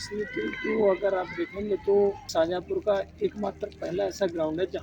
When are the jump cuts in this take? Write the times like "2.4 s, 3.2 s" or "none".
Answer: 2.3 s